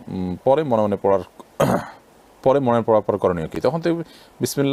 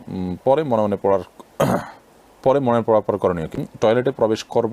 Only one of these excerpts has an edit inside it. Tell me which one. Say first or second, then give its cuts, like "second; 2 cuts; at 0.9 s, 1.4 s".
second; 1 cut; at 3.5 s